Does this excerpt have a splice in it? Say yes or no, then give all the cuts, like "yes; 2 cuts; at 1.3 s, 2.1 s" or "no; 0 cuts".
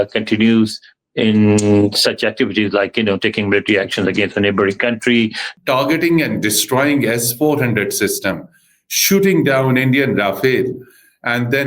yes; 1 cut; at 5.5 s